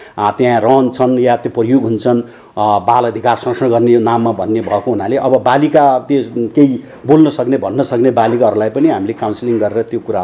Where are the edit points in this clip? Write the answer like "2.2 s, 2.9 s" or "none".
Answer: none